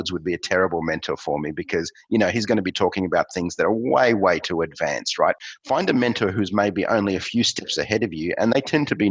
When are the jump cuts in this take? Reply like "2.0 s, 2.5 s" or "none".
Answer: 5.4 s